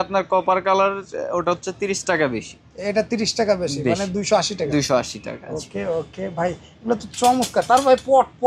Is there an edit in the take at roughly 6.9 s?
no; 0 cuts

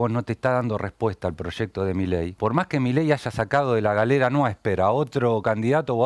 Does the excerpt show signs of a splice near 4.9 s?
no; 1 cut; at 2.3 s

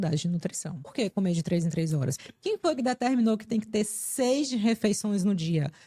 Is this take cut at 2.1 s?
yes; 2 cuts; at 0.9 s, 2.1 s

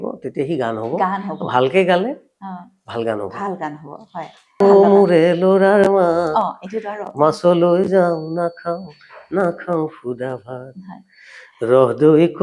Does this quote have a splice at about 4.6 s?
yes; 1 cut; at 4.6 s

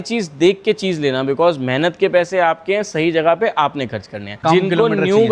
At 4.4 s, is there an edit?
yes; 1 cut; at 4.4 s

